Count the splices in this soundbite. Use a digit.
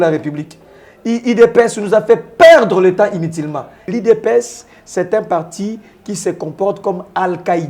1